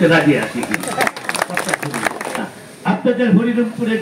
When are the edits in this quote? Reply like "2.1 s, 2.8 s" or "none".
2.3 s